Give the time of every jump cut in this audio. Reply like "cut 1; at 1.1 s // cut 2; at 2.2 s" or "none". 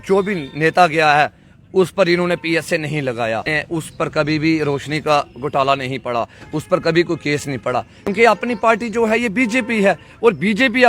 cut 1; at 3.5 s // cut 2; at 8.0 s